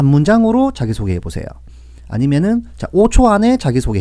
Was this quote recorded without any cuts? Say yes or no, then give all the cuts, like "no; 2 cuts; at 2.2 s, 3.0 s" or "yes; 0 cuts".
yes; 0 cuts